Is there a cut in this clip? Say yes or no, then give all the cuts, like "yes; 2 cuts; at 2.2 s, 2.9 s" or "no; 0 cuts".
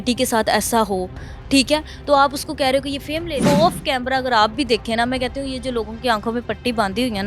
yes; 1 cut; at 3.4 s